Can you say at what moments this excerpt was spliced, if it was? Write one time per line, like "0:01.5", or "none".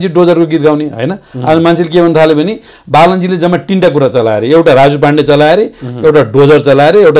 none